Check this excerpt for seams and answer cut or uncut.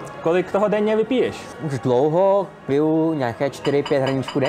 cut